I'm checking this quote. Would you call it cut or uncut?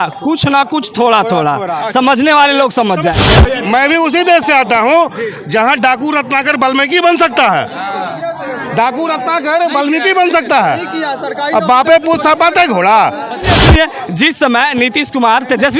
cut